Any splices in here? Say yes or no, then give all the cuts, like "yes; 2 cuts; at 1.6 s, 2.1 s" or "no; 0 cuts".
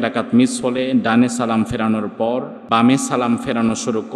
yes; 1 cut; at 2.6 s